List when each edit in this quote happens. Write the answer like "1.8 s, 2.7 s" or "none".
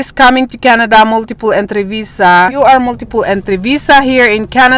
none